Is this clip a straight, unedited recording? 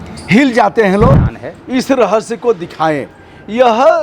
no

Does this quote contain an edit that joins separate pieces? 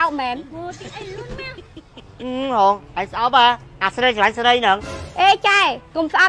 no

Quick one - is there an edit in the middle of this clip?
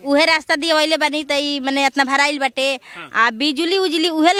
no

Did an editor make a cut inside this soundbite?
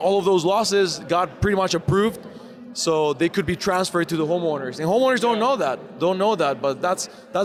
no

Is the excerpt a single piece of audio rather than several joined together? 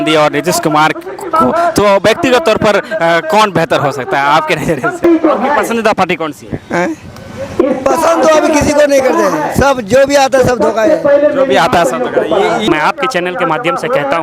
no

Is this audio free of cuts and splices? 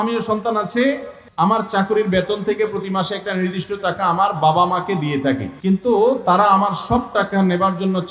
no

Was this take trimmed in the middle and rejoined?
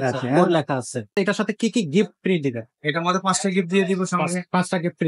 yes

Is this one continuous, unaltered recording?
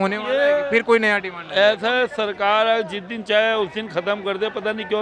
yes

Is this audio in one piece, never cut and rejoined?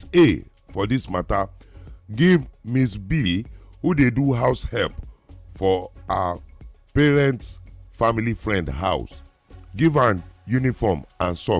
yes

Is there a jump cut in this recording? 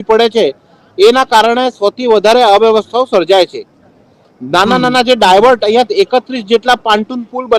no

